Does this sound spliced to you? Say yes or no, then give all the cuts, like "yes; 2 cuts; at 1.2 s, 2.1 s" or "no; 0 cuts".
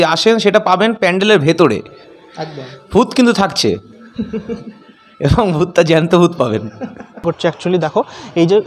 yes; 1 cut; at 7.2 s